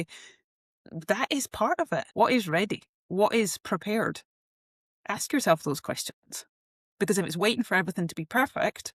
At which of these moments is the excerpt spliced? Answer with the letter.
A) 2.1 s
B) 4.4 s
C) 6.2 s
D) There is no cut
A